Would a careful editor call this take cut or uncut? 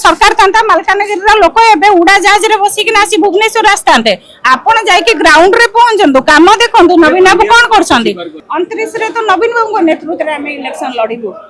cut